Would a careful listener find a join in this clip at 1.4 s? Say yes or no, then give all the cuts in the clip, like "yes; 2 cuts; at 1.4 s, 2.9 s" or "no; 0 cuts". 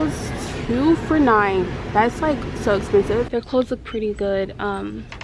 no; 1 cut; at 3.3 s